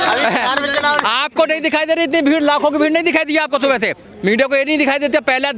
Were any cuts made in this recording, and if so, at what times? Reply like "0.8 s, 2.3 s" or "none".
4.0 s